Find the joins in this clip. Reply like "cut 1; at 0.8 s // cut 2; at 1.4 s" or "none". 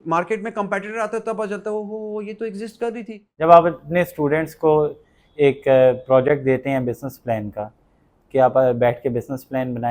cut 1; at 3.2 s